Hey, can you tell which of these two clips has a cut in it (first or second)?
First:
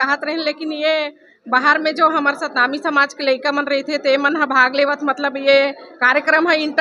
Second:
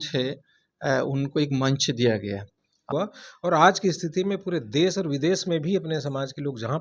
second